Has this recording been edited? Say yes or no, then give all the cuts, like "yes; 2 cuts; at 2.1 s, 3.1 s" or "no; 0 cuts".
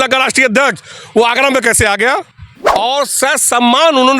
yes; 1 cut; at 2.5 s